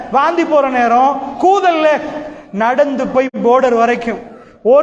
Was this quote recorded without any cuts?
yes; 0 cuts

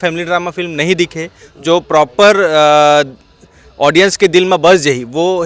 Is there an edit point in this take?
no; 0 cuts

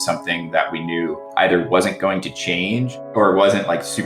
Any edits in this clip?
yes; 2 cuts; at 1.2 s, 2.9 s

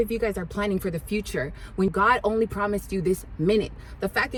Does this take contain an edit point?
no; 0 cuts

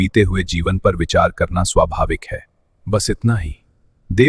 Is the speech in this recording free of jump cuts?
yes; 0 cuts

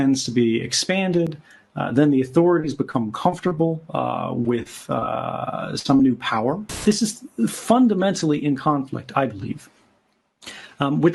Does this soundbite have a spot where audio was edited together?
yes; 1 cut; at 6.8 s

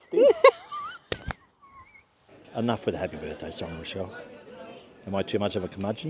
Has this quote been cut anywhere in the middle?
yes; 1 cut; at 2.4 s

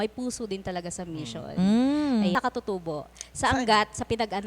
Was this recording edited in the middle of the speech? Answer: yes; 1 cut; at 2.3 s

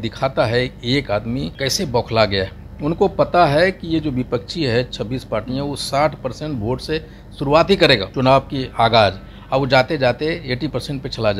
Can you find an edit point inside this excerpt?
yes; 2 cuts; at 1.5 s, 8.1 s

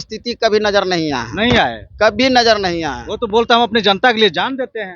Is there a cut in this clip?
no; 0 cuts

